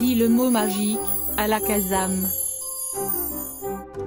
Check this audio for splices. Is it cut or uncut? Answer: cut